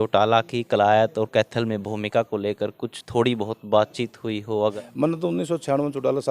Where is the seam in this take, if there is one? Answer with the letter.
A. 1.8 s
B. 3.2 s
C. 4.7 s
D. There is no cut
C